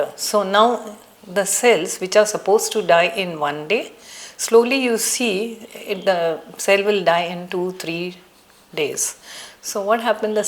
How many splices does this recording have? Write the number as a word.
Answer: zero